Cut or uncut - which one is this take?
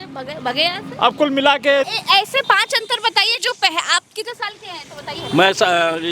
cut